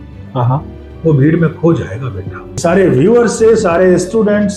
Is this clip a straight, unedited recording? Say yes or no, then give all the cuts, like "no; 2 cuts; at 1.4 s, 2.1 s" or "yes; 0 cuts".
no; 1 cut; at 2.6 s